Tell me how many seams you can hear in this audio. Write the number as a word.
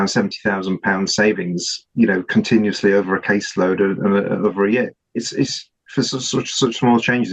zero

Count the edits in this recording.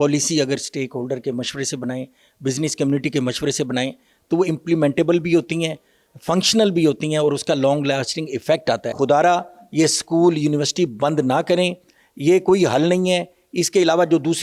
one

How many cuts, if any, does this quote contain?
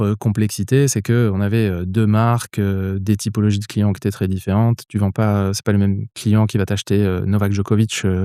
zero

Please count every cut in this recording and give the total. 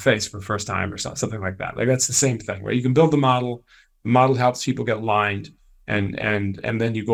zero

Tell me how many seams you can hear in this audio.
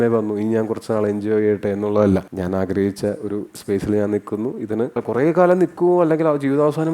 two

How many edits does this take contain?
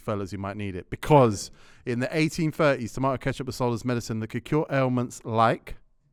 zero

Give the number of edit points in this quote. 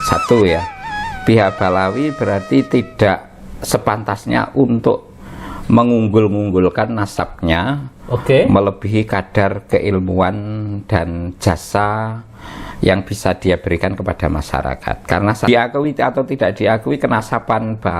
one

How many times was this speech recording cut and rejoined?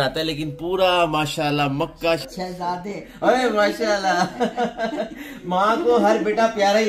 one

